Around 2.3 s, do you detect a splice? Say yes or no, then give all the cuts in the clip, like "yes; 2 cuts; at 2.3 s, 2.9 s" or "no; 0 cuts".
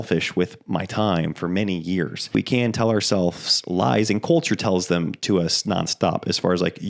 yes; 1 cut; at 2.3 s